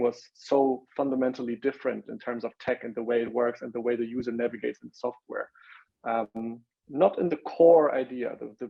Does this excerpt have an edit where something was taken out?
no; 0 cuts

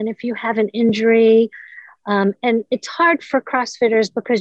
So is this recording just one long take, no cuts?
yes; 0 cuts

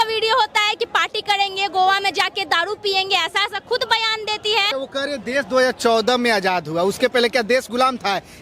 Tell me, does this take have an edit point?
no; 0 cuts

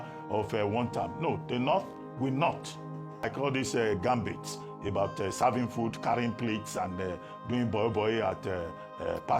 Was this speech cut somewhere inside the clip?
yes; 1 cut; at 3.3 s

